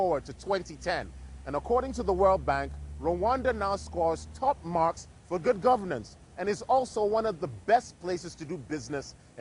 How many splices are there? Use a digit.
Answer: 1